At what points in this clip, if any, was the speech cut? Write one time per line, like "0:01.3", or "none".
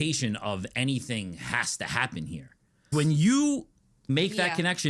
0:02.9
0:04.1